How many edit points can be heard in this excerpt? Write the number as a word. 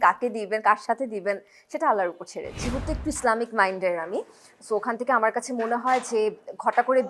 one